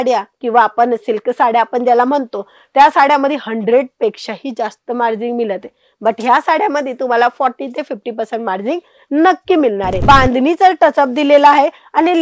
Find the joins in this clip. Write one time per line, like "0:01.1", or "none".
0:09.9

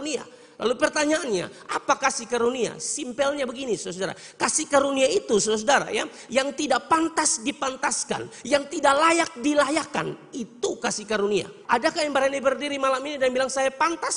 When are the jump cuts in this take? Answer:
0:11.6

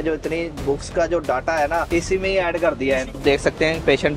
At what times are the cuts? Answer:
0:01.9
0:03.2

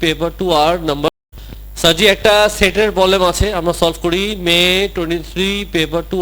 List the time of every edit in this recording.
0:01.1

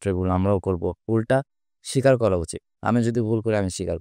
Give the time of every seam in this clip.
0:01.0

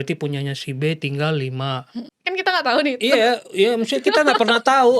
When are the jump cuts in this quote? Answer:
0:02.0

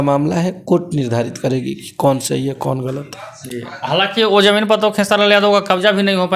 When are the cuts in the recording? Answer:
none

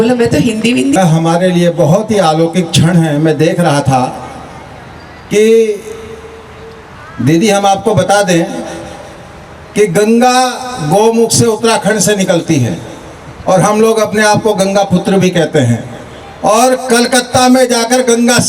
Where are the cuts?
0:00.9

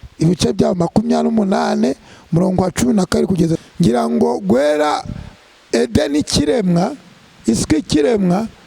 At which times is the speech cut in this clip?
0:03.6

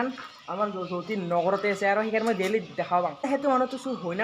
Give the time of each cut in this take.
0:03.3

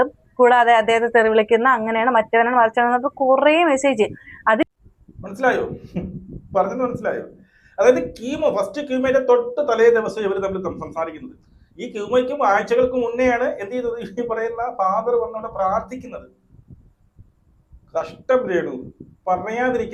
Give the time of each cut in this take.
none

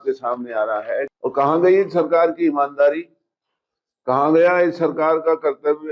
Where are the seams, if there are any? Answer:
0:01.1

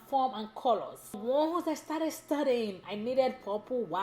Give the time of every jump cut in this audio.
0:01.2

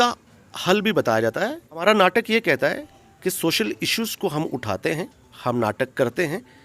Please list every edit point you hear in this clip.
0:01.8

